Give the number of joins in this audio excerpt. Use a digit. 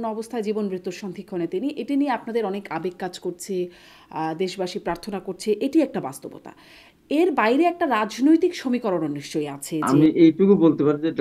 1